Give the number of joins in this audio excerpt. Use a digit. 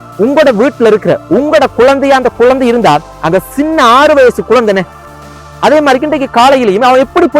1